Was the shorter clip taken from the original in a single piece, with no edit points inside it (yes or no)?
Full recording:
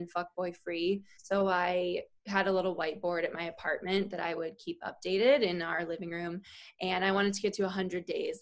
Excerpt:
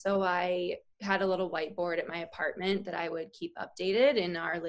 yes